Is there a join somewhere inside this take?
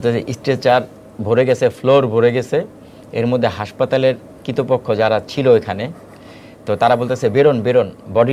no; 0 cuts

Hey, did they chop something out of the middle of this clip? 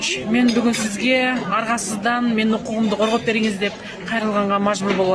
no; 0 cuts

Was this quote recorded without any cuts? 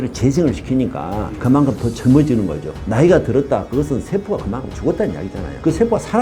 no; 1 cut; at 2.6 s

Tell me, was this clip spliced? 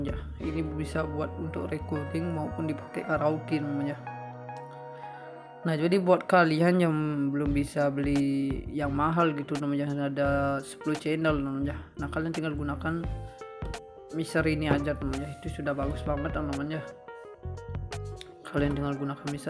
yes; 2 cuts; at 17.2 s, 18.5 s

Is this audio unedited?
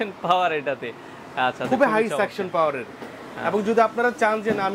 yes; 0 cuts

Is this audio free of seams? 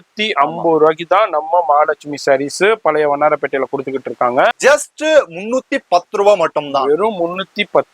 no; 1 cut; at 4.6 s

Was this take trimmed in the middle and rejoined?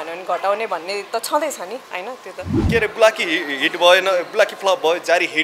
yes; 1 cut; at 2.6 s

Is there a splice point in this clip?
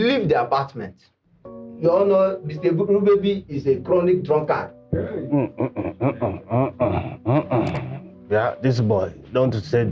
yes; 1 cut; at 1.4 s

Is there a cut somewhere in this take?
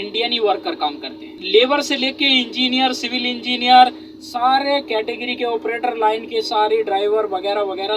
yes; 1 cut; at 1.3 s

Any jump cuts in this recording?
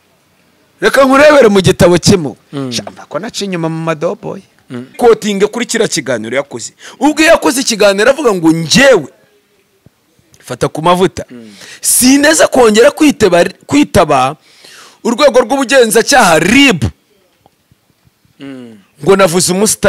yes; 1 cut; at 4.9 s

